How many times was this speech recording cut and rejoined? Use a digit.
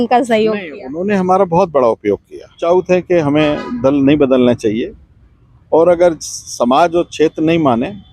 1